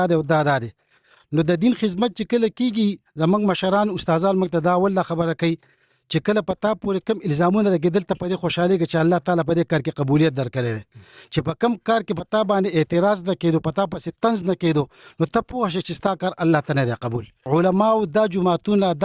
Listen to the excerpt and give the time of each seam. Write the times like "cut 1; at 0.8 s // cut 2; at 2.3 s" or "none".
cut 1; at 17.3 s